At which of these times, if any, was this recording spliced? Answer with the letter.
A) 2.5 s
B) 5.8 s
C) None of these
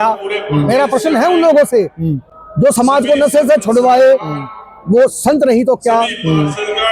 C